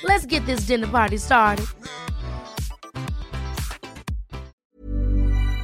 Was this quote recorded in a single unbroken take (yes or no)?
no